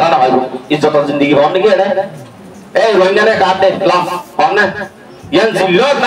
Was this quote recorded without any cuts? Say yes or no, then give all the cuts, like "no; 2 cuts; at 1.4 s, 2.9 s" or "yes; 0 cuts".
yes; 0 cuts